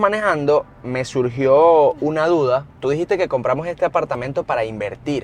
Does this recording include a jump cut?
yes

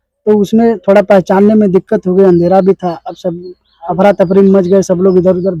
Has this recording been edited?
no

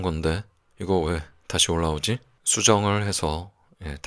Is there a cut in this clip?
yes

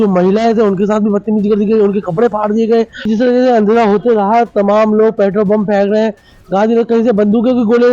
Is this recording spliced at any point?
yes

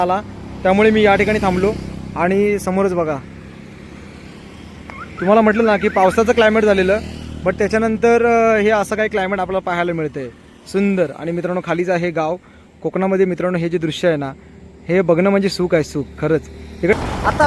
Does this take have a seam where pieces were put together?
no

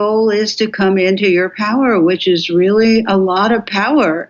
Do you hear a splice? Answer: no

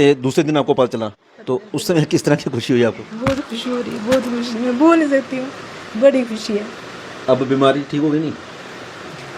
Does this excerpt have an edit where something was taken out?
no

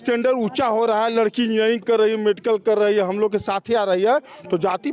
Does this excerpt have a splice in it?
no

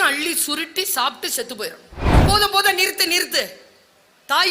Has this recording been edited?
yes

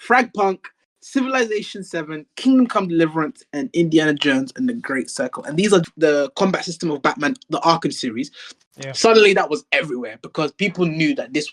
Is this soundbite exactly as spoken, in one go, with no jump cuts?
no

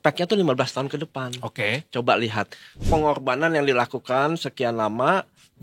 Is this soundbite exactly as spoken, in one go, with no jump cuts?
no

